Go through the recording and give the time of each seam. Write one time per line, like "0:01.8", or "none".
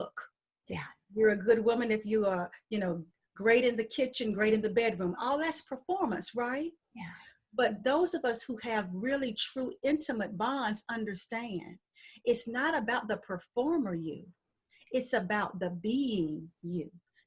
none